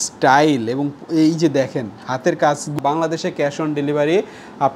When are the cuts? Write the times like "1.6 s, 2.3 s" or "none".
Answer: 2.8 s